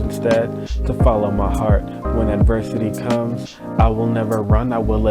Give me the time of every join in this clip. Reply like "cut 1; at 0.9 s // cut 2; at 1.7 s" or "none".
none